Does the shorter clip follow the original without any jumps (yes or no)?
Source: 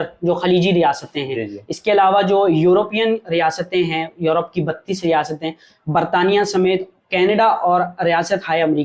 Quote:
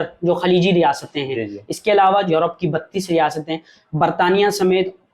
no